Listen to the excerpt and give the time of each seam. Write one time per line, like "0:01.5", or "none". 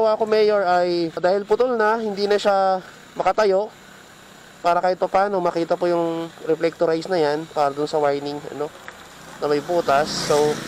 0:01.2